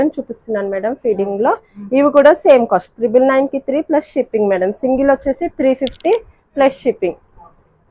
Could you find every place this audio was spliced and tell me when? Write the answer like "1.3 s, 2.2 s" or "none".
none